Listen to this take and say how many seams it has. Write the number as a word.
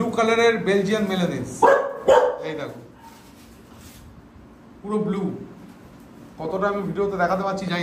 zero